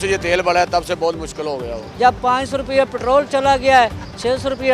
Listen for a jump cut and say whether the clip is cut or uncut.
cut